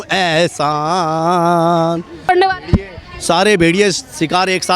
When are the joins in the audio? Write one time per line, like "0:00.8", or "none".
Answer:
0:02.3